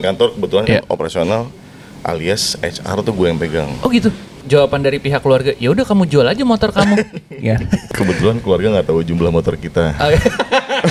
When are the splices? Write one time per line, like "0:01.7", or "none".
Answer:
0:04.4
0:07.8